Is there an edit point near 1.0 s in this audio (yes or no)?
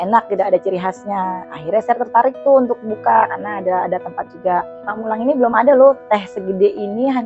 no